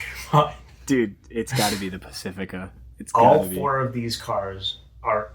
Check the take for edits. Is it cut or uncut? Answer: uncut